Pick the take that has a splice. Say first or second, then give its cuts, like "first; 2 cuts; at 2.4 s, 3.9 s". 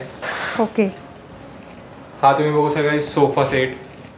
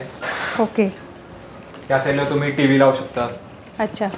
second; 1 cut; at 1.7 s